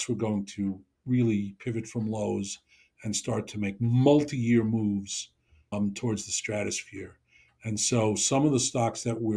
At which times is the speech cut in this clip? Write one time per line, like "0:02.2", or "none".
0:05.7